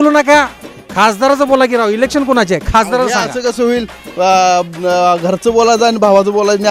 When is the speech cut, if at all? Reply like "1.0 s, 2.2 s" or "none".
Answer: none